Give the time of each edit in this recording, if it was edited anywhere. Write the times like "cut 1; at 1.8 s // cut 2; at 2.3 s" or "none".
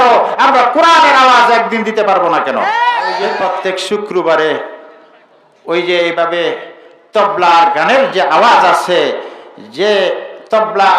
cut 1; at 3.3 s